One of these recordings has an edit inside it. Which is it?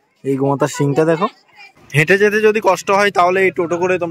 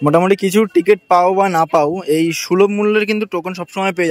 first; 1 cut; at 1.8 s

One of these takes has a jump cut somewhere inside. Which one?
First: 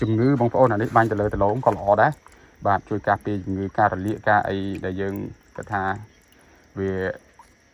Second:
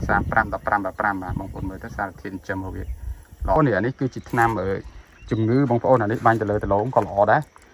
second; 1 cut; at 3.6 s

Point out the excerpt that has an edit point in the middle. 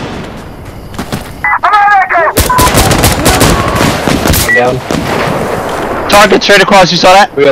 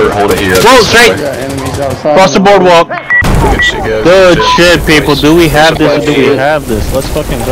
second; 1 cut; at 3.2 s

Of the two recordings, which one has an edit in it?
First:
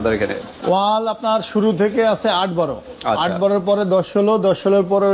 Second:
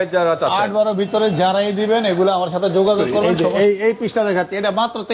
second; 1 cut; at 3.3 s

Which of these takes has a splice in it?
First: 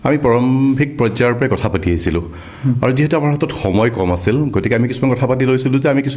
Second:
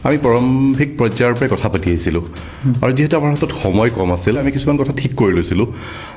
second; 1 cut; at 4.4 s

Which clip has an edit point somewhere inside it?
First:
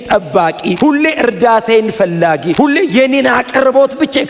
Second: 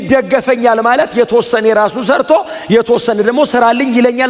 first; 2 cuts; at 0.8 s, 2.5 s

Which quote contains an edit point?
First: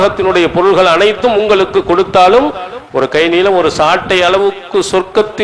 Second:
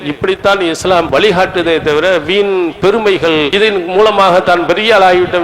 second; 2 cuts; at 1.1 s, 3.5 s

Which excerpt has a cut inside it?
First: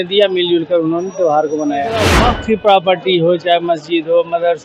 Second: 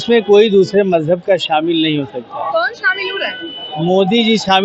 first; 1 cut; at 2.3 s

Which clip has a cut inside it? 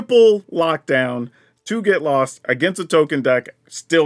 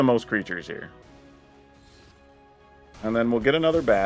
second; 2 cuts; at 1.0 s, 2.9 s

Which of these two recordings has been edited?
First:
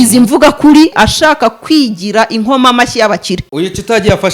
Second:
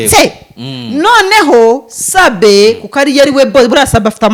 first; 2 cuts; at 0.9 s, 3.4 s

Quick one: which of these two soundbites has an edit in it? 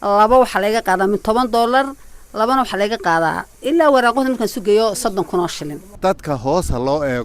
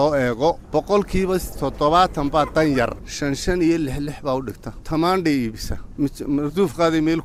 first; 1 cut; at 5.9 s

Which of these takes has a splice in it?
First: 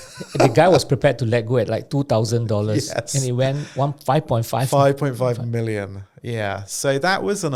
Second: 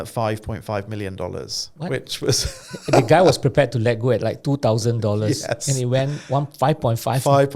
second; 1 cut; at 1.6 s

